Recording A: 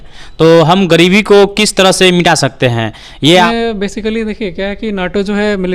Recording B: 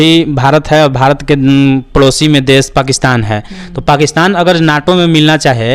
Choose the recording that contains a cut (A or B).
A